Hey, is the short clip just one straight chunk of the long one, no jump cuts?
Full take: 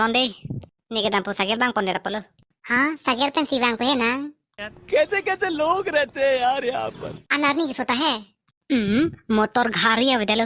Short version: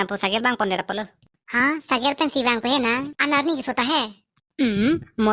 no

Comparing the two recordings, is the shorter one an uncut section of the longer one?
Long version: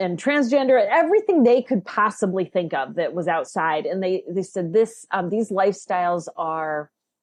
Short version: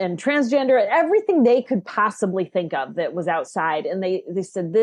yes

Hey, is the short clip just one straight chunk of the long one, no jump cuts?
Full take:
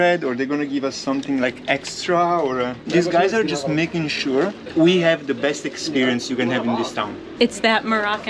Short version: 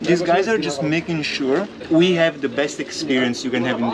yes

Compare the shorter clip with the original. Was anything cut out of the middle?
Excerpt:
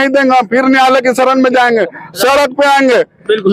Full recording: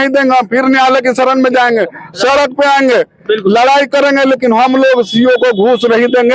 no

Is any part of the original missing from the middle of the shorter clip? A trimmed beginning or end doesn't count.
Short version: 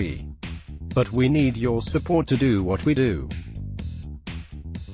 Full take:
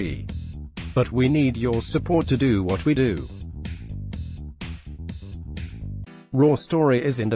yes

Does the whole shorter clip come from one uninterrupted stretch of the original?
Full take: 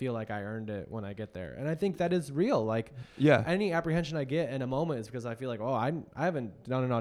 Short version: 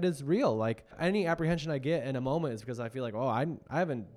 no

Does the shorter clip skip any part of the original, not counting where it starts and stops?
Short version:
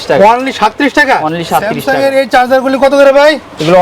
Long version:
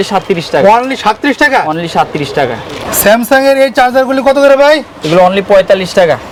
yes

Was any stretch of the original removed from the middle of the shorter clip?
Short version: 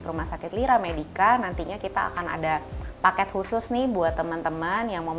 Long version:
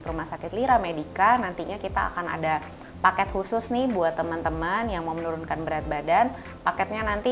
no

